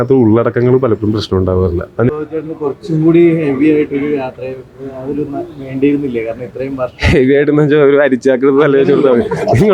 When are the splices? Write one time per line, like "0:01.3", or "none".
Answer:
0:02.1